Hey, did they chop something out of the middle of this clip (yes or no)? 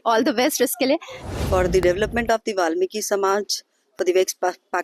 yes